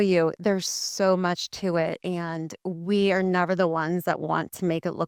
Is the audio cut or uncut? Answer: uncut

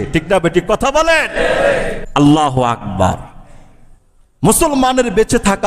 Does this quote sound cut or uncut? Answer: cut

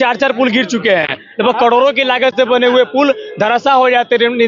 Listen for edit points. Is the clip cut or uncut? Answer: uncut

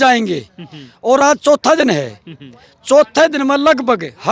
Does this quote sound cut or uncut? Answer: uncut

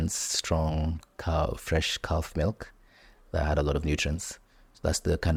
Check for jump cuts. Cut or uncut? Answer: uncut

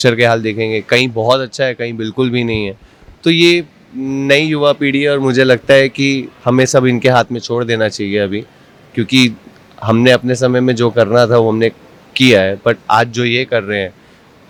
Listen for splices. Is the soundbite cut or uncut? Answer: uncut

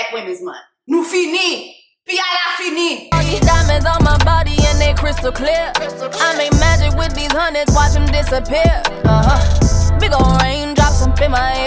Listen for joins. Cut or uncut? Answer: cut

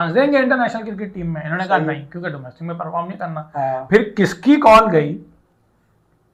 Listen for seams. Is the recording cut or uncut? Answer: uncut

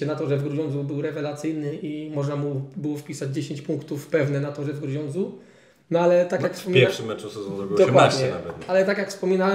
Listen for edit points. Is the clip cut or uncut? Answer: uncut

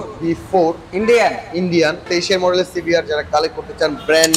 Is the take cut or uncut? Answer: cut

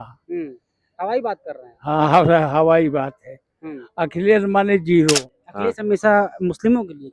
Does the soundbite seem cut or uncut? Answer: cut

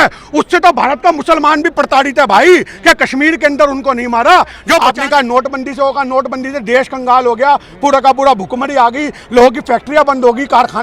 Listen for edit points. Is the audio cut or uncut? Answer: cut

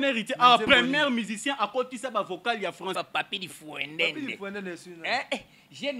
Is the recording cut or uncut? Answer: cut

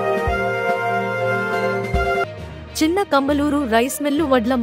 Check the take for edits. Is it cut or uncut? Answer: cut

